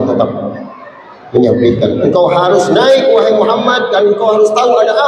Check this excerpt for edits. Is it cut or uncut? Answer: uncut